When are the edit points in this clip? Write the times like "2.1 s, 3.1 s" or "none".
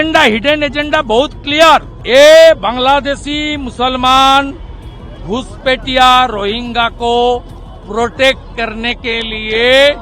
1.9 s